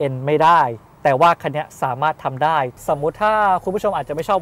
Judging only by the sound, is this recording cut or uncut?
cut